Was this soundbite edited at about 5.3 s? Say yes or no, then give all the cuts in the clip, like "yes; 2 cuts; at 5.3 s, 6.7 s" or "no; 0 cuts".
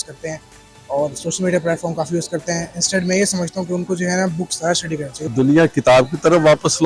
yes; 1 cut; at 5.3 s